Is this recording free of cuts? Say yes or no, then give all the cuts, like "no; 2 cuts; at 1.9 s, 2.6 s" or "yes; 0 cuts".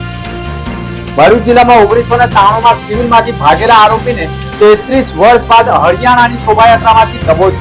yes; 0 cuts